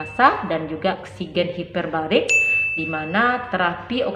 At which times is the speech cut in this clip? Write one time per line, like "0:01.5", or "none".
0:01.1